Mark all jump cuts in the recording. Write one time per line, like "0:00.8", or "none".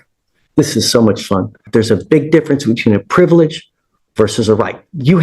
0:01.7